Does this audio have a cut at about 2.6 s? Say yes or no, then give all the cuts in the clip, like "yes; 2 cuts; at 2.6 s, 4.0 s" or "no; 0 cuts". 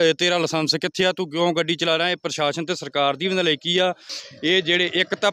no; 1 cut; at 4.1 s